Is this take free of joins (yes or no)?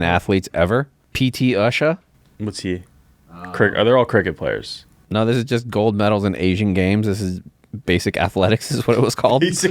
no